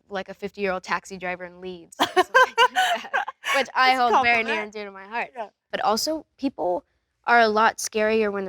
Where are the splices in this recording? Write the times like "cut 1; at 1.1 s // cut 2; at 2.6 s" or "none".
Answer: cut 1; at 5.7 s